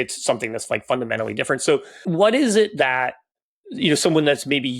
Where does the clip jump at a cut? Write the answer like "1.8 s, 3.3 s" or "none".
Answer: 2.0 s